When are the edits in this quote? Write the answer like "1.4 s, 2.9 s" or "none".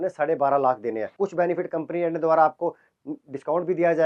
1.1 s